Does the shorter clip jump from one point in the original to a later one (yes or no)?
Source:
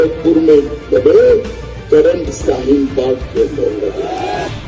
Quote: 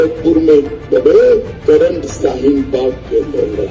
yes